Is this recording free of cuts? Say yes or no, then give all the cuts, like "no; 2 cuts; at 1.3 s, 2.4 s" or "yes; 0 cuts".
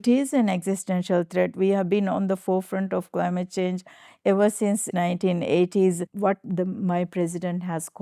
no; 2 cuts; at 4.9 s, 6.1 s